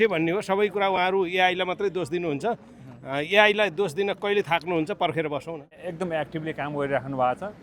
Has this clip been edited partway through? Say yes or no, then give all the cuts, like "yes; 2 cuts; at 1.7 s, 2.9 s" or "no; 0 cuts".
yes; 1 cut; at 5.8 s